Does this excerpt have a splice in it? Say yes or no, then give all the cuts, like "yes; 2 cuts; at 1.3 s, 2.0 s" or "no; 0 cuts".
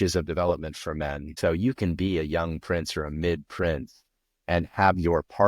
yes; 1 cut; at 1.3 s